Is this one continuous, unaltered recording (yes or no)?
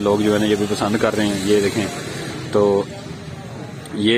yes